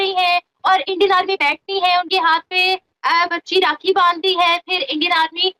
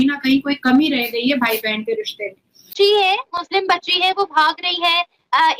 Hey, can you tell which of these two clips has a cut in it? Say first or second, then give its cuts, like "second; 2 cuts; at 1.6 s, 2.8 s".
second; 1 cut; at 2.6 s